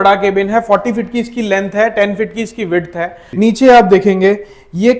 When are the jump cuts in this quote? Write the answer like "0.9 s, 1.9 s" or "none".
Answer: 3.2 s